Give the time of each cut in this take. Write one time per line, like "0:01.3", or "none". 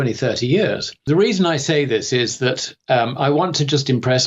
0:00.9